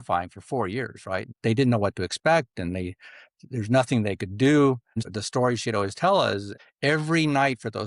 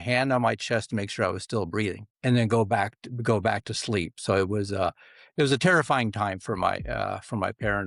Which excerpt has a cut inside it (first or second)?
first